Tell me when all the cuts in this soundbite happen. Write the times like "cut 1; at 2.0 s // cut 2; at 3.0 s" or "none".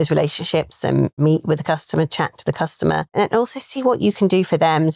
cut 1; at 1.2 s // cut 2; at 3.1 s